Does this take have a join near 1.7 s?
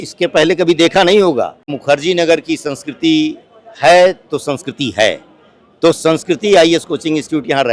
yes; 1 cut; at 1.7 s

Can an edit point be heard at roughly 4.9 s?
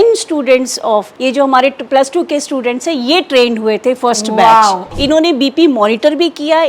yes; 2 cuts; at 1.1 s, 4.9 s

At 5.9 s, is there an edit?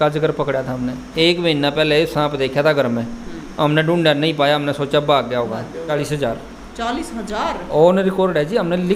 yes; 2 cuts; at 1.0 s, 5.9 s

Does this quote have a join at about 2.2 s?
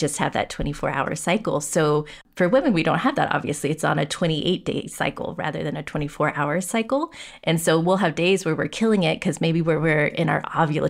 yes; 1 cut; at 2.2 s

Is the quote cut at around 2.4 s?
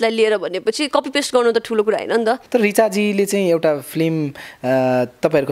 yes; 1 cut; at 2.4 s

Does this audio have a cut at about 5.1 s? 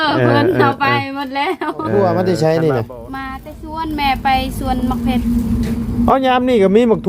no; 1 cut; at 2.0 s

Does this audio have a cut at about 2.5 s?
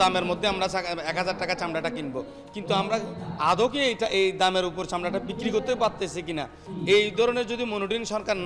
no; 1 cut; at 6.6 s

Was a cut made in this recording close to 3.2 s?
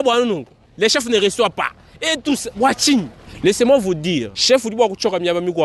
yes; 2 cuts; at 3.2 s, 4.3 s

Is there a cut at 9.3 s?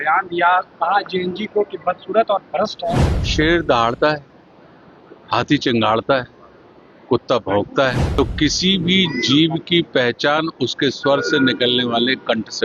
no; 2 cuts; at 3.3 s, 8.0 s

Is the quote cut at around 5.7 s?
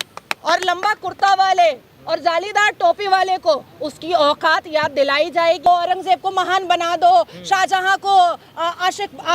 yes; 1 cut; at 5.7 s

